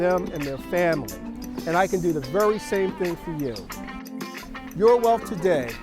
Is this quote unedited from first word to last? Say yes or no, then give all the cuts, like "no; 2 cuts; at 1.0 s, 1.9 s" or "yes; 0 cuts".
no; 1 cut; at 4.1 s